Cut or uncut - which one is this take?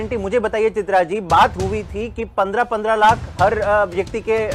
uncut